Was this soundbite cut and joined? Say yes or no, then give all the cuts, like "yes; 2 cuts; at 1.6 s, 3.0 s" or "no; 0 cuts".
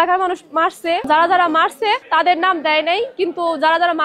yes; 2 cuts; at 1.1 s, 2.0 s